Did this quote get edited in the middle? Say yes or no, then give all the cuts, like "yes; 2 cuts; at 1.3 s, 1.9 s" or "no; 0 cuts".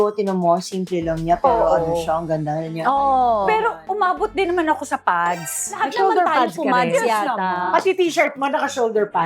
yes; 1 cut; at 7.6 s